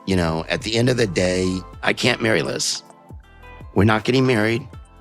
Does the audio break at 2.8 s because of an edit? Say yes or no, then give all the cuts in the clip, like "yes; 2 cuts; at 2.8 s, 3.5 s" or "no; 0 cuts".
no; 0 cuts